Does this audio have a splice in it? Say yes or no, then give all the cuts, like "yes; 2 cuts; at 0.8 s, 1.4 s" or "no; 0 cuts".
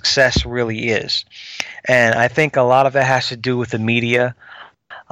no; 0 cuts